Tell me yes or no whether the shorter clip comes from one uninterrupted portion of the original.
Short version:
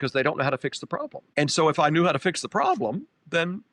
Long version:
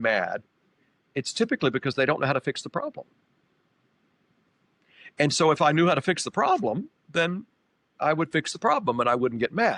no